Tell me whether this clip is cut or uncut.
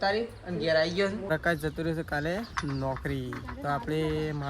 cut